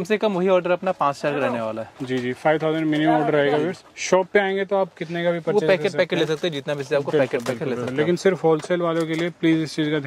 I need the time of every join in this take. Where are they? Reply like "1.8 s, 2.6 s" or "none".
none